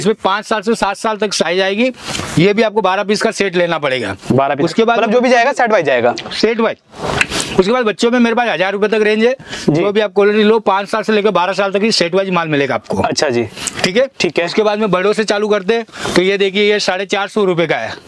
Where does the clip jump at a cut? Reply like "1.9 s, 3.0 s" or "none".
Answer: none